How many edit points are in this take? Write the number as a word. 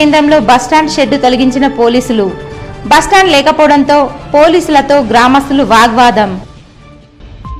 zero